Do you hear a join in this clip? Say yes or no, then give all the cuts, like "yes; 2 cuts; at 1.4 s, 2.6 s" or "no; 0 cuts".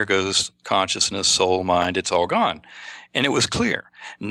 no; 0 cuts